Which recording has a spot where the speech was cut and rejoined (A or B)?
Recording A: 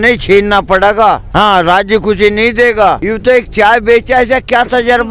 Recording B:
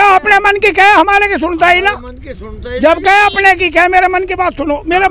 A